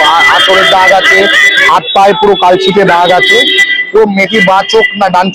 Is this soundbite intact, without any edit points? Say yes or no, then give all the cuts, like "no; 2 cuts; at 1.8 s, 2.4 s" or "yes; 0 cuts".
yes; 0 cuts